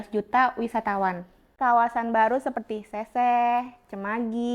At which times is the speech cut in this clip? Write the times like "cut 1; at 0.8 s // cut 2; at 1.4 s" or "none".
cut 1; at 1.5 s